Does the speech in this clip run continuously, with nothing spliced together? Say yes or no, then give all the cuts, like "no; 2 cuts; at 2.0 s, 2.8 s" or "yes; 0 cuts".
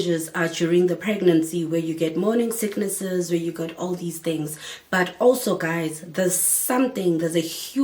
yes; 0 cuts